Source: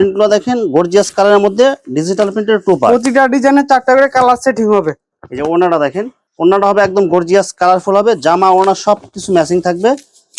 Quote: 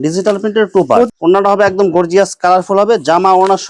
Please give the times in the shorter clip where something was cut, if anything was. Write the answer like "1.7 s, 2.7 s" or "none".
1.1 s